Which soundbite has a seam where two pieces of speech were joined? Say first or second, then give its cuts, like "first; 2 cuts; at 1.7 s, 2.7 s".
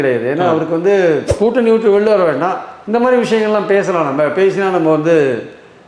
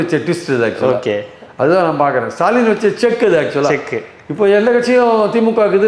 first; 1 cut; at 1.3 s